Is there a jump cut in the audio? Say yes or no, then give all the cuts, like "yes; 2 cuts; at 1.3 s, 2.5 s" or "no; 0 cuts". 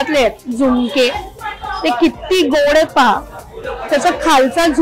no; 0 cuts